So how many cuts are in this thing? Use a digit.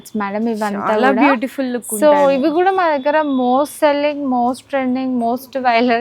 0